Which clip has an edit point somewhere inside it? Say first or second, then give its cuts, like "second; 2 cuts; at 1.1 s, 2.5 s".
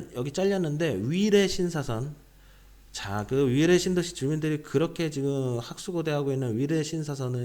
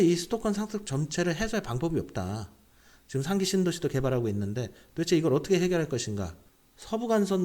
second; 1 cut; at 6.3 s